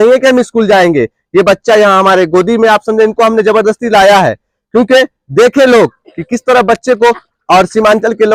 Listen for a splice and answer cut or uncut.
uncut